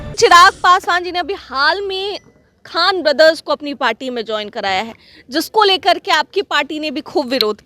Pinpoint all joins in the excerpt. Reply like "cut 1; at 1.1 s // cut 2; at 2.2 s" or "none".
none